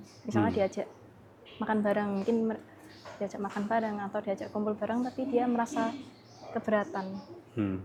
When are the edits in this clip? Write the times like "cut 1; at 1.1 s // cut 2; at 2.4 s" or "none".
none